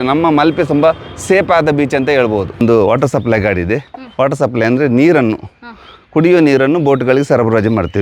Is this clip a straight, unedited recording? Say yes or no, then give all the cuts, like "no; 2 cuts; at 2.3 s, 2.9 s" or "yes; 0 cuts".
no; 1 cut; at 2.6 s